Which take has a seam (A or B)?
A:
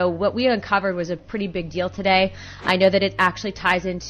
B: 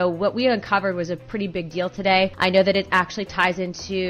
B